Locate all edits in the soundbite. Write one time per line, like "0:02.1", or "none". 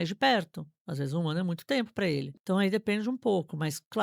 0:02.3